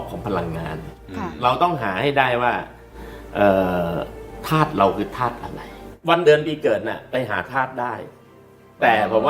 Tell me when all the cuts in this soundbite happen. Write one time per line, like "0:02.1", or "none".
0:06.2